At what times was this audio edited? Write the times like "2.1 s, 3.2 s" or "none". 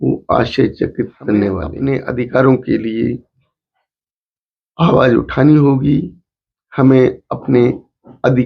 1.7 s